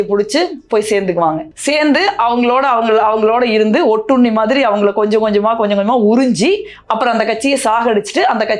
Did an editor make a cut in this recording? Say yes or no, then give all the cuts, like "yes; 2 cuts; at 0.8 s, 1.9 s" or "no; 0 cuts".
no; 0 cuts